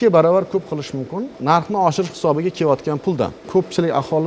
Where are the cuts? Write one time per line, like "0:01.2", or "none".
0:01.3
0:03.4